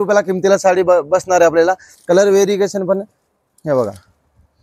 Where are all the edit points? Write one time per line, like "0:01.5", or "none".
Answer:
0:01.9